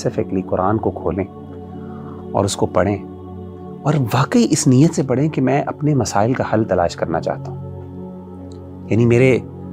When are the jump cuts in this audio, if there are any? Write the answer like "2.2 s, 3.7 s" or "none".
none